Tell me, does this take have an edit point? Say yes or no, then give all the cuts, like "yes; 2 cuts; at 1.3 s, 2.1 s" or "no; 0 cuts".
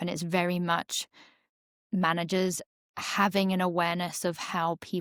no; 0 cuts